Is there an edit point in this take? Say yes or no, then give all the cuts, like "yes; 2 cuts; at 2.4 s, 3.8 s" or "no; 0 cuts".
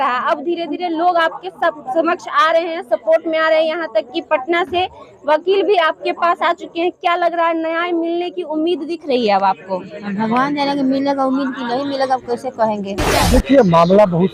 yes; 1 cut; at 13.1 s